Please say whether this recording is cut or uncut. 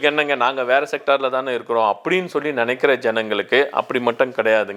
uncut